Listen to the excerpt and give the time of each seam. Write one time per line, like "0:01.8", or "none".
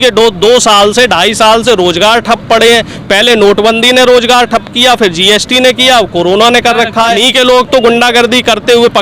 0:07.2